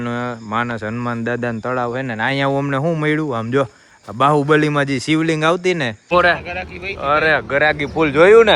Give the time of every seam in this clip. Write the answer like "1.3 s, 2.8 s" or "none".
6.4 s